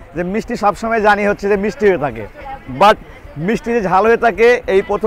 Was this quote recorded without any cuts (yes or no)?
yes